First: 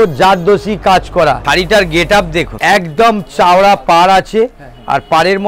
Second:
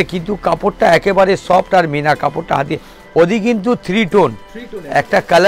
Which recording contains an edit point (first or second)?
first